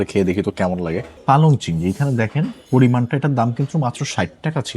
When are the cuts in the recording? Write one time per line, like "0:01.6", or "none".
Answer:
0:01.1